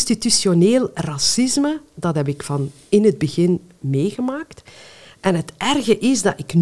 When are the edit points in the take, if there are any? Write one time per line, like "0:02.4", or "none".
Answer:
none